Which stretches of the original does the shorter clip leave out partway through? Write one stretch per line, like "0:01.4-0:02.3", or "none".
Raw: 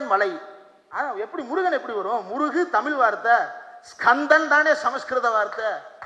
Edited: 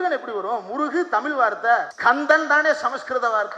0:03.5-0:03.9